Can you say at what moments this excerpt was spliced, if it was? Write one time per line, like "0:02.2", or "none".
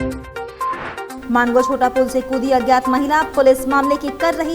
0:01.1